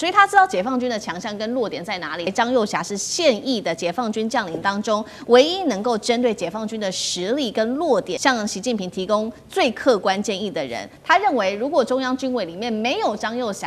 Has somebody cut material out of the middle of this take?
yes; 2 cuts; at 2.3 s, 8.1 s

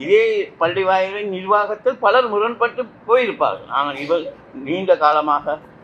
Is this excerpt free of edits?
yes; 0 cuts

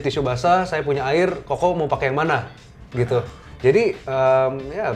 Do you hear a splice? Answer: yes; 1 cut; at 3.4 s

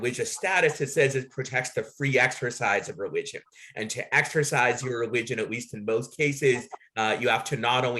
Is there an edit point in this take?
no; 0 cuts

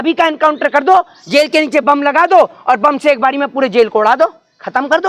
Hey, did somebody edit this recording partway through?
no; 0 cuts

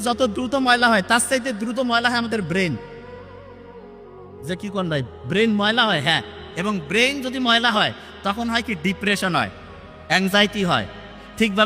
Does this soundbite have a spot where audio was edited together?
no; 0 cuts

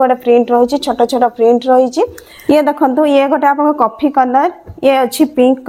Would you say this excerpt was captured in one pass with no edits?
no; 1 cut; at 2.3 s

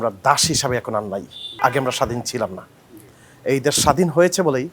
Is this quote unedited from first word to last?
no; 1 cut; at 1.4 s

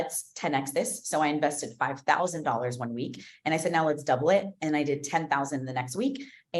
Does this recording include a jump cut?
no; 0 cuts

